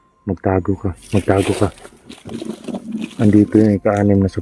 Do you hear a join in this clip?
no; 0 cuts

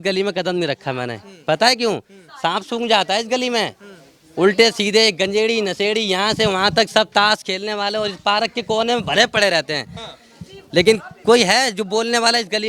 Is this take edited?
no; 0 cuts

